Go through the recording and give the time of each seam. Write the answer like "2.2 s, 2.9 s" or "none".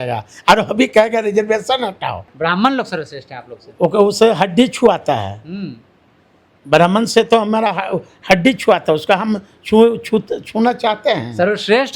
2.3 s